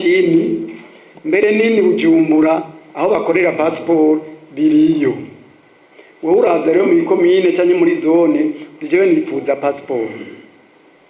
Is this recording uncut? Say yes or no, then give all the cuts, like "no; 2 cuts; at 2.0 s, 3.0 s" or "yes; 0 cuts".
yes; 0 cuts